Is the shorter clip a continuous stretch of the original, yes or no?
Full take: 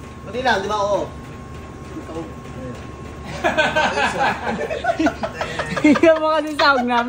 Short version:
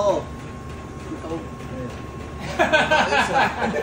yes